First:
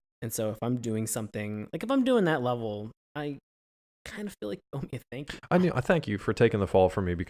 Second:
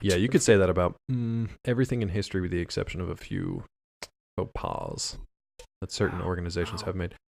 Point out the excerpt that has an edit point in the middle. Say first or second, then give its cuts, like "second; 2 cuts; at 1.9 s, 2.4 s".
second; 1 cut; at 2.0 s